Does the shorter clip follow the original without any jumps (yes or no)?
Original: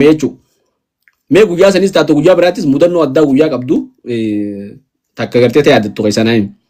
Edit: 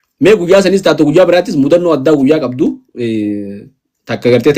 yes